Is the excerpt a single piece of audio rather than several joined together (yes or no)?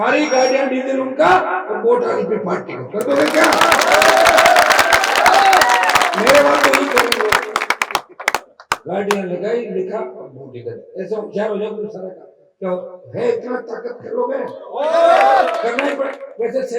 yes